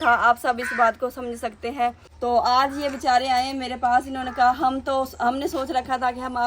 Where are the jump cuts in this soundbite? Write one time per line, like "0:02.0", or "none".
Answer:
0:02.1

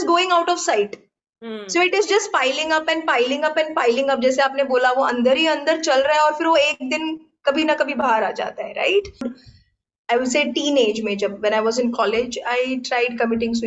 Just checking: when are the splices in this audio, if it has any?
0:09.4

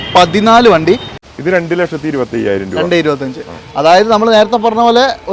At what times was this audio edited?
0:01.2

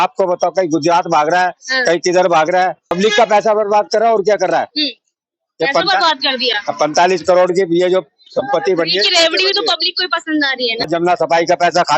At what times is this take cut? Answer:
0:02.9
0:10.9

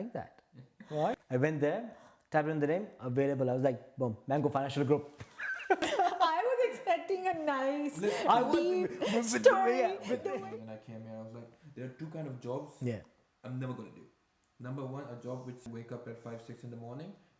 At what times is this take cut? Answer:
0:01.2
0:05.8
0:10.3
0:15.7

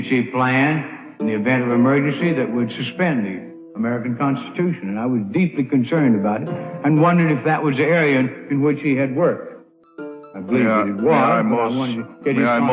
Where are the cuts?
0:04.9

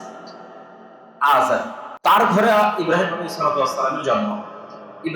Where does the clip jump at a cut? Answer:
0:01.8

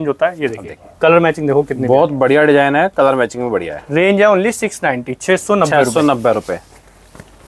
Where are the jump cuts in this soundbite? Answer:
none

